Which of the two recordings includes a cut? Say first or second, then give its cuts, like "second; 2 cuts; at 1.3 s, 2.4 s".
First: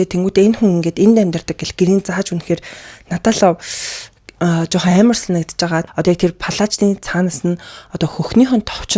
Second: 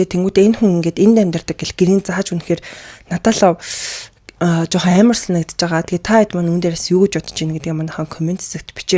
first; 1 cut; at 5.9 s